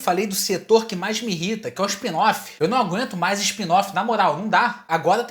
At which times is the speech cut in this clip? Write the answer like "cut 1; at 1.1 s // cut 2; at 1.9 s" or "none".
none